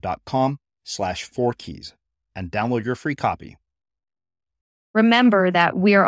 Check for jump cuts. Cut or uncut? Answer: cut